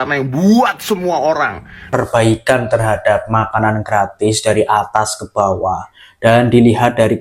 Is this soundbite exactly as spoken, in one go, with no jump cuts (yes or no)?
no